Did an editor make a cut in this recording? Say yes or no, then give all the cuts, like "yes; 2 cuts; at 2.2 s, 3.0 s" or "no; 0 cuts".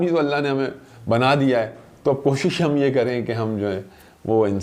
no; 0 cuts